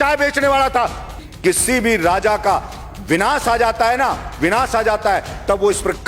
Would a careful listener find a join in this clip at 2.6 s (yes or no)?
no